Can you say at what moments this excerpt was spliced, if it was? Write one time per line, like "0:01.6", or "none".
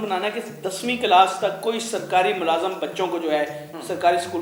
none